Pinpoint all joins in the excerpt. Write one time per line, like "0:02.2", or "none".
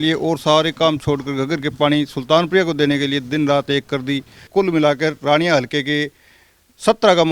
0:04.5